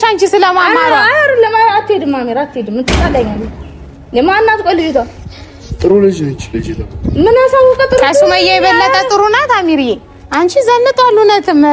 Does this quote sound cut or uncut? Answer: uncut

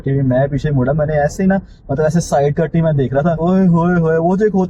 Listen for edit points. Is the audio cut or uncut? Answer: uncut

